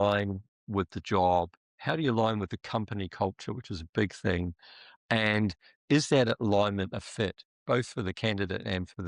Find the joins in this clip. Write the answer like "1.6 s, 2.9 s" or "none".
none